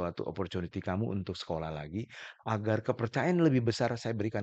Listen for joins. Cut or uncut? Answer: uncut